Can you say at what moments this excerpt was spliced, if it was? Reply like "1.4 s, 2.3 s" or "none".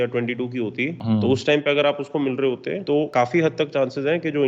1.0 s, 2.9 s